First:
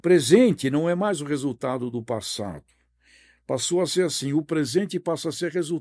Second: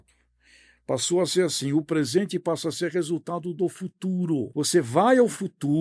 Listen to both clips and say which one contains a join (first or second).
second